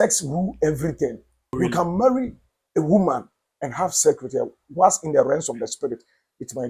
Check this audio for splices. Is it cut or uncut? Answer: cut